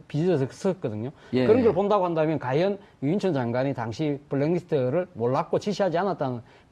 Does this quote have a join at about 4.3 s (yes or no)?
no